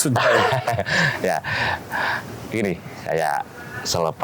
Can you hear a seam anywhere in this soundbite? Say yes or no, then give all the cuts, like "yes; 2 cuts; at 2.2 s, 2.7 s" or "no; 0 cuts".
no; 0 cuts